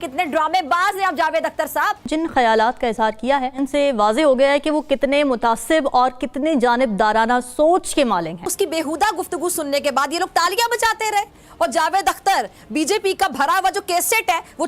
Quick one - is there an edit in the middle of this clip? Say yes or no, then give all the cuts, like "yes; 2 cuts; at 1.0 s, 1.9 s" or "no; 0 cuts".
yes; 2 cuts; at 2.0 s, 8.5 s